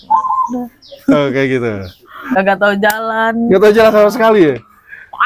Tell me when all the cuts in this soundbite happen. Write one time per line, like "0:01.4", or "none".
0:02.2